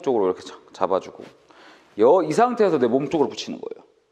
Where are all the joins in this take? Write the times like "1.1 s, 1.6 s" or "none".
none